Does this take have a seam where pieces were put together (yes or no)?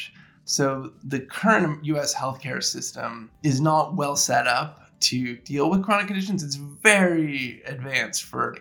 yes